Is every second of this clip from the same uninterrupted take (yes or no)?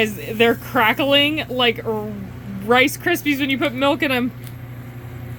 yes